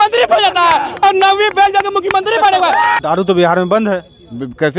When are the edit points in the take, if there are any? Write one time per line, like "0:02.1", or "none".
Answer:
0:03.0